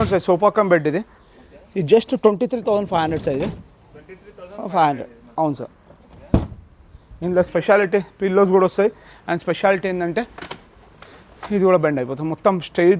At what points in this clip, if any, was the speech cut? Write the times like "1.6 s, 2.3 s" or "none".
none